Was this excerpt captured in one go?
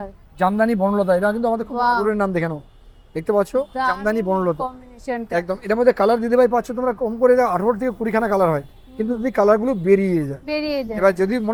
yes; 0 cuts

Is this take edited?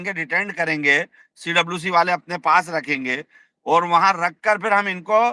no; 0 cuts

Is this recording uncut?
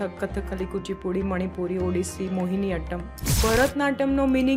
no; 1 cut; at 3.4 s

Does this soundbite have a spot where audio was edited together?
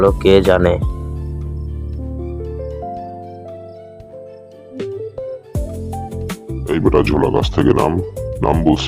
yes; 1 cut; at 4.8 s

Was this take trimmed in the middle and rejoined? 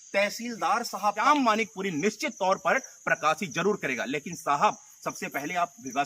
yes; 1 cut; at 1.2 s

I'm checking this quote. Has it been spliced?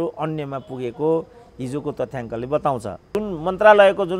yes; 1 cut; at 3.1 s

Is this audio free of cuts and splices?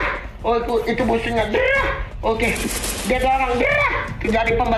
yes; 0 cuts

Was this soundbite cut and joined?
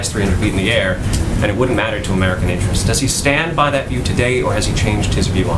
no; 0 cuts

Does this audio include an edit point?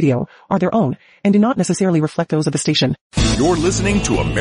yes; 1 cut; at 3.0 s

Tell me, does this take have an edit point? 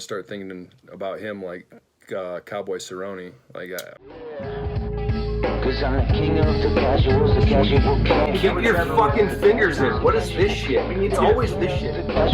yes; 1 cut; at 3.9 s

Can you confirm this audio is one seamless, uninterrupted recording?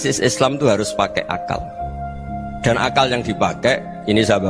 yes; 0 cuts

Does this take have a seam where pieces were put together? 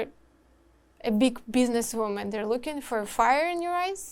no; 0 cuts

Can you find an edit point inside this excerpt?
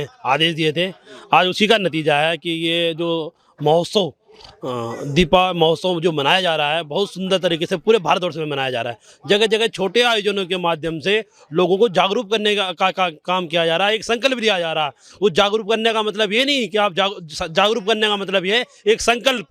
no; 0 cuts

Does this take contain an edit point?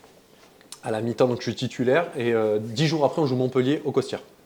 no; 0 cuts

